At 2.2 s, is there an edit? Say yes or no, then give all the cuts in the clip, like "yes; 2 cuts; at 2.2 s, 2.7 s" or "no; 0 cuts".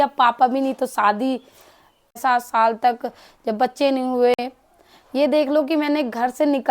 yes; 1 cut; at 2.2 s